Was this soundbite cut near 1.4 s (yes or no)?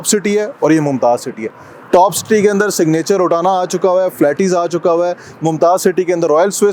no